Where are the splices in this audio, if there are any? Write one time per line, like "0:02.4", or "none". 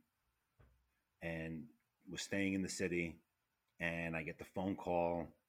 0:02.0